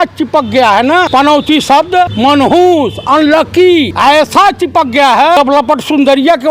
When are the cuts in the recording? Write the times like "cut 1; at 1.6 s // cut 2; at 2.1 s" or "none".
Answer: cut 1; at 1.1 s // cut 2; at 2.1 s // cut 3; at 3.9 s // cut 4; at 5.4 s